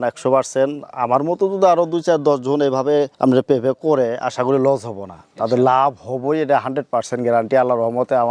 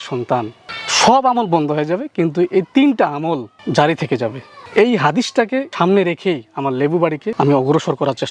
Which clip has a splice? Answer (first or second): second